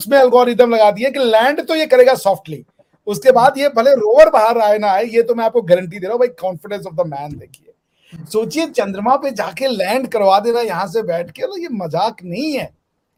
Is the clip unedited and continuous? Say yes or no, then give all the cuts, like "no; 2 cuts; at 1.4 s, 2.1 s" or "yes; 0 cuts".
yes; 0 cuts